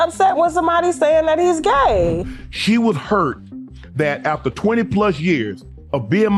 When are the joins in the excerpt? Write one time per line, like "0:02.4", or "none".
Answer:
0:02.3